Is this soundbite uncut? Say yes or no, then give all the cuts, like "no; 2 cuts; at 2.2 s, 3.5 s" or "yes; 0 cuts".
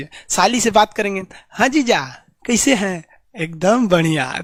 yes; 0 cuts